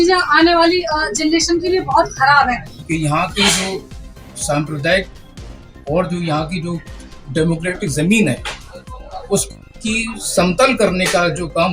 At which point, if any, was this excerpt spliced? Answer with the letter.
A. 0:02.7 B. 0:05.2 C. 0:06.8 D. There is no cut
A